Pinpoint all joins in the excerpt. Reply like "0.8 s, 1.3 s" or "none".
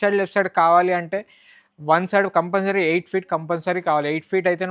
none